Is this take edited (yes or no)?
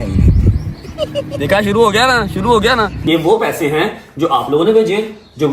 yes